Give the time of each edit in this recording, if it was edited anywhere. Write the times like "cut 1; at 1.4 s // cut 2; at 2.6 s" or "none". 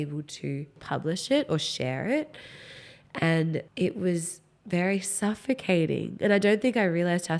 cut 1; at 0.8 s // cut 2; at 3.7 s